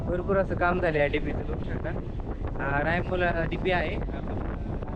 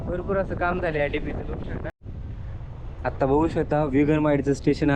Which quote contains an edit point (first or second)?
second